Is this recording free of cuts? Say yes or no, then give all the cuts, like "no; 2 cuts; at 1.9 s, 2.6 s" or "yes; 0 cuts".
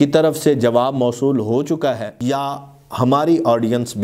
no; 1 cut; at 2.1 s